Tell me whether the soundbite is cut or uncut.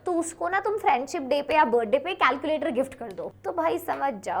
cut